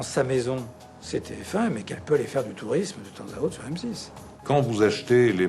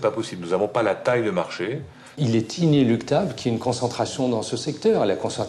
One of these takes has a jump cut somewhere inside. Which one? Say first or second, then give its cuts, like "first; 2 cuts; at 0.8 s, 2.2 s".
first; 1 cut; at 4.3 s